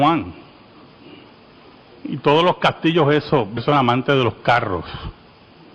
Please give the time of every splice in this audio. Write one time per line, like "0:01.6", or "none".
none